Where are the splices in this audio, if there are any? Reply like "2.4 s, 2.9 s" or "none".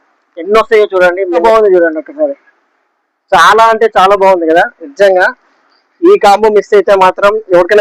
1.4 s